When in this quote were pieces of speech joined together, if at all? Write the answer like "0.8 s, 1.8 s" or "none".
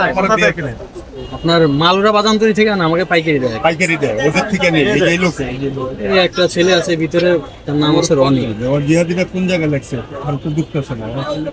none